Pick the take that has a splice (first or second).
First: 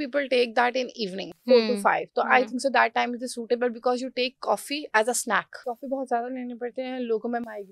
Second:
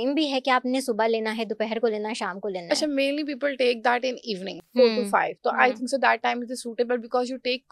first